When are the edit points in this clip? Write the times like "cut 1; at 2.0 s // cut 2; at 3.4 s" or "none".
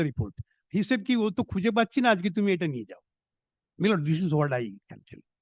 none